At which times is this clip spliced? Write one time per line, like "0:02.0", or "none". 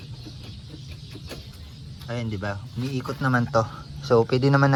none